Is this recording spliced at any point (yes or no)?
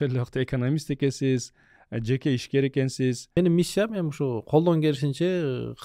yes